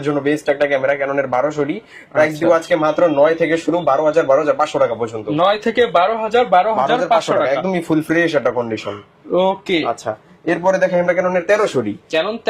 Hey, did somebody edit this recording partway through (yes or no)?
no